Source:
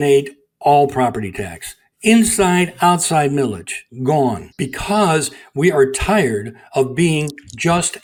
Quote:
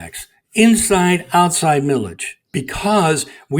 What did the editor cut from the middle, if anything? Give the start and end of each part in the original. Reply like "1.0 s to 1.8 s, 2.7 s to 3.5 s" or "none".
3.9 s to 4.5 s